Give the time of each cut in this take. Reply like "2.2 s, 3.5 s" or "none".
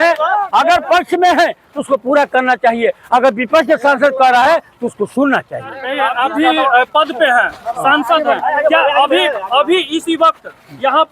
5.8 s